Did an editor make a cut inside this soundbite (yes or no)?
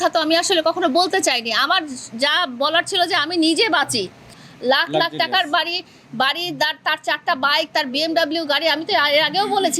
yes